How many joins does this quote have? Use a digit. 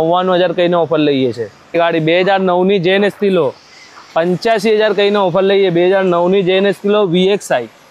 1